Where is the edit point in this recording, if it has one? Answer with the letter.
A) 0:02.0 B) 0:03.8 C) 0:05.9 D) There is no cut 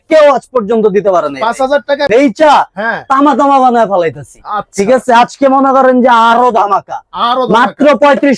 A